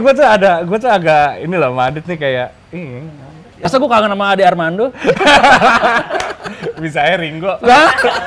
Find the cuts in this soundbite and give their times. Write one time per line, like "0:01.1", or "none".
0:03.7